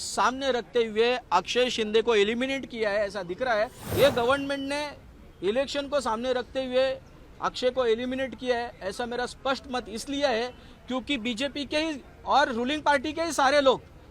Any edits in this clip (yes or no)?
yes